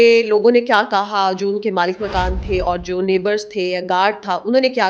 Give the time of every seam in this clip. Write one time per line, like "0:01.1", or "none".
none